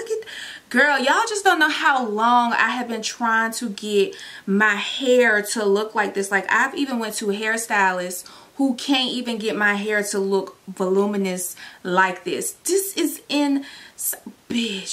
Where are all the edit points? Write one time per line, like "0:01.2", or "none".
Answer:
none